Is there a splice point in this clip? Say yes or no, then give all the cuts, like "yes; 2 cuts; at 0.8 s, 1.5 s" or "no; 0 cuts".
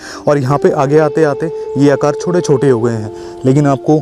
no; 0 cuts